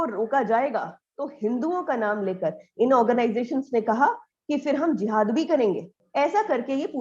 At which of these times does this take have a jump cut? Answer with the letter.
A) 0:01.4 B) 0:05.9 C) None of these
B